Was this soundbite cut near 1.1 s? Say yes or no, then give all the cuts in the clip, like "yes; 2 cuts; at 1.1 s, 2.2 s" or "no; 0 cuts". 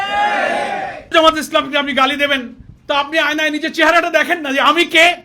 yes; 1 cut; at 1.1 s